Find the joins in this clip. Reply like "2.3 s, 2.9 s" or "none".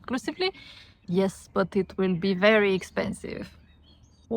0.9 s